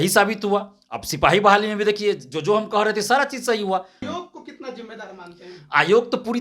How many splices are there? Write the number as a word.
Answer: one